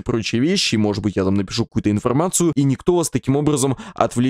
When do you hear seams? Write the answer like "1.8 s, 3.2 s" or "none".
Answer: 2.5 s

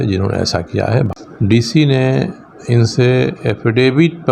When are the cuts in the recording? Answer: 1.1 s

